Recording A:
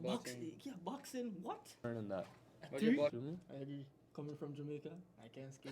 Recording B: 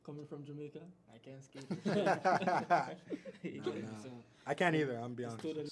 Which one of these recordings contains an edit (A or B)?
A